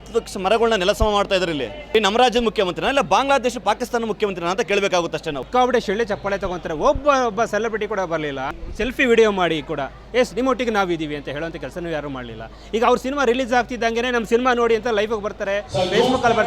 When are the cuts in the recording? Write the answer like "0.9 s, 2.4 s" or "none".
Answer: 1.8 s, 5.4 s